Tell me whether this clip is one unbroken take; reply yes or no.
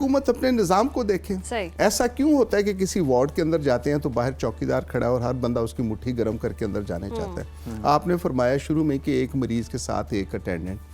yes